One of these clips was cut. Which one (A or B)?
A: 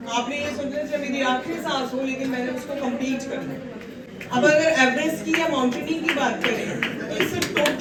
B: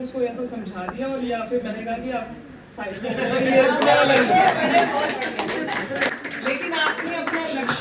B